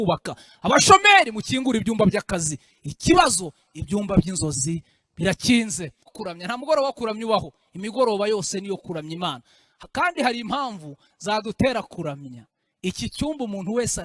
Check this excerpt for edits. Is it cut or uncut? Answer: cut